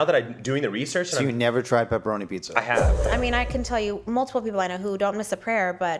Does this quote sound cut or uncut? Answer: cut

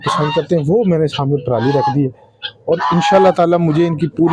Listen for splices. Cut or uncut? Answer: uncut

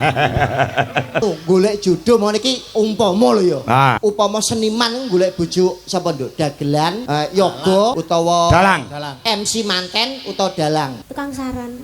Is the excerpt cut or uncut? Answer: cut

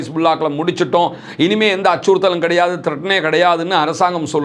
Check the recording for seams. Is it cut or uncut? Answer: uncut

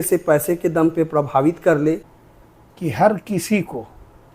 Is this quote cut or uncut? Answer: cut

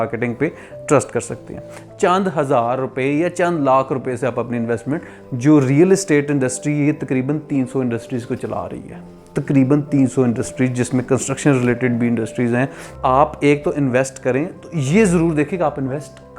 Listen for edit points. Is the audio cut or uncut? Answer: cut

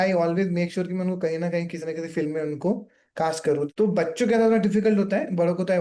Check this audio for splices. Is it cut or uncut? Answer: cut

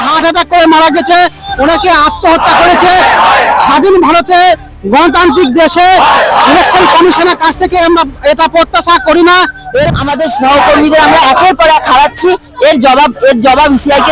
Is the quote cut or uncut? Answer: cut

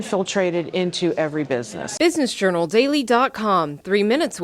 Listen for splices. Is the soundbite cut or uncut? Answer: cut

